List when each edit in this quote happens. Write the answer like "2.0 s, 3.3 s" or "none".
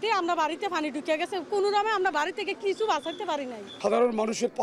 none